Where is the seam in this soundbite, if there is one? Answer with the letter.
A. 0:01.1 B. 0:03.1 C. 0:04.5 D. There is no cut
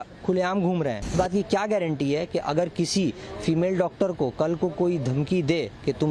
A